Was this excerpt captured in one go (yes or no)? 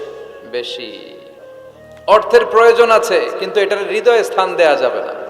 no